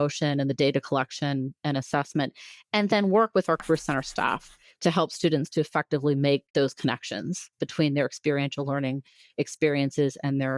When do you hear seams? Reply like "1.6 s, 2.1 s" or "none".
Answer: 1.6 s, 6.5 s

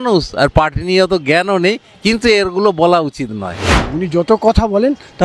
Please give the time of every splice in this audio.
3.8 s

